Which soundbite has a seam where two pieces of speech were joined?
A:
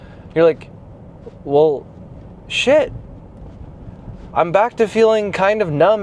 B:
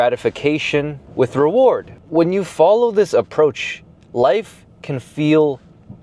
B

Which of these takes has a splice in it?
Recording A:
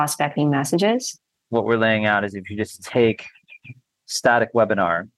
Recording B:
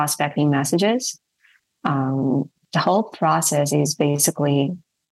A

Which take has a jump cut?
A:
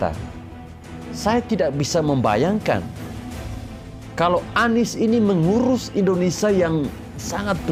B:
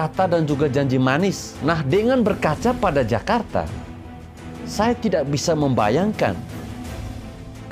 B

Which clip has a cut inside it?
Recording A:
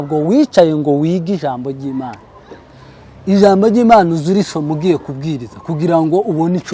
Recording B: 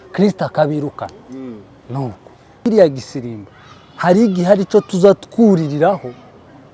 B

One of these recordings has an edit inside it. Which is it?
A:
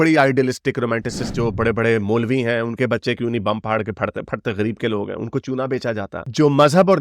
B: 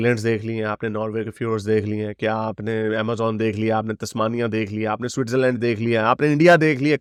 A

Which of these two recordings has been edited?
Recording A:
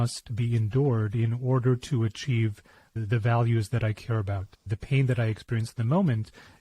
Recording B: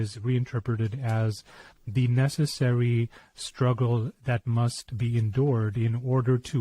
A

